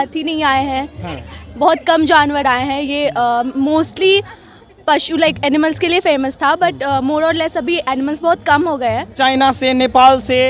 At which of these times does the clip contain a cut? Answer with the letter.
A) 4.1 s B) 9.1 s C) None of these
B